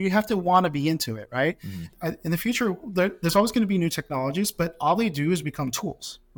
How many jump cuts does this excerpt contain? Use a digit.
1